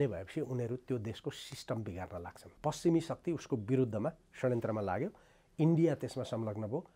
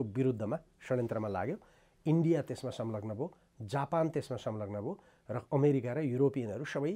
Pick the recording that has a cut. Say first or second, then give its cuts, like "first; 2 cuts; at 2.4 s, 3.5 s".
first; 1 cut; at 2.5 s